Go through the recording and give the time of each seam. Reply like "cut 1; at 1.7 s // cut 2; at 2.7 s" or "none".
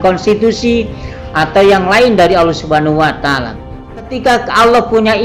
cut 1; at 4.1 s

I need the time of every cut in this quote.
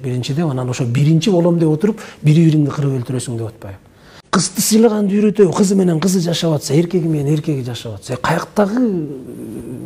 cut 1; at 4.1 s

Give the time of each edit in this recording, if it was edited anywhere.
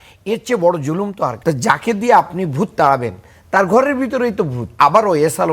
cut 1; at 1.4 s // cut 2; at 4.8 s

